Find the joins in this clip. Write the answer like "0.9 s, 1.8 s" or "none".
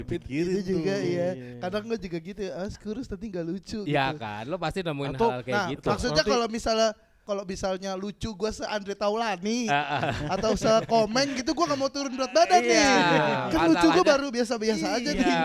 7.1 s